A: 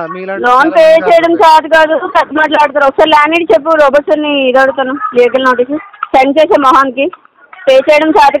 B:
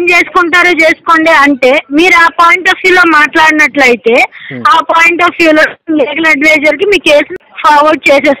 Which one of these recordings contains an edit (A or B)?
B